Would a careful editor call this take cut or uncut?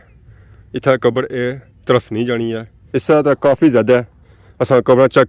cut